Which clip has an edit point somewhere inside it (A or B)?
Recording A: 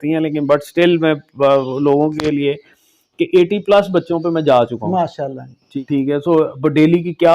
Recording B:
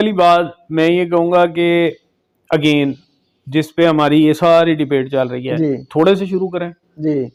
A